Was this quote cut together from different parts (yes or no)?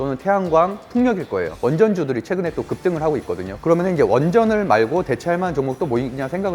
yes